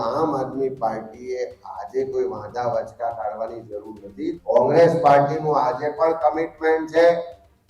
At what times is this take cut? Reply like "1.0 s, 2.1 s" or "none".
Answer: 4.4 s